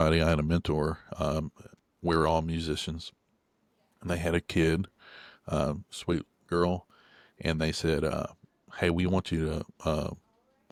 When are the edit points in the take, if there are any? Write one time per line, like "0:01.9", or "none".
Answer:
none